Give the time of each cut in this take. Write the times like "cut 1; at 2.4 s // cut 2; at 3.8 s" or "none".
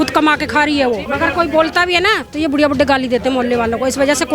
cut 1; at 1.1 s